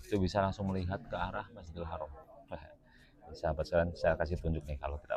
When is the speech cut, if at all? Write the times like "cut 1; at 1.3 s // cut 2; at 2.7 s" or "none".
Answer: none